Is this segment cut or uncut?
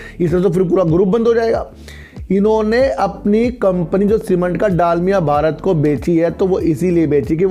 uncut